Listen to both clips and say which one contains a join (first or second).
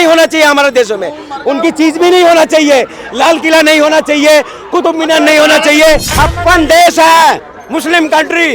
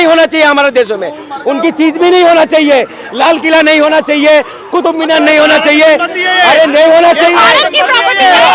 first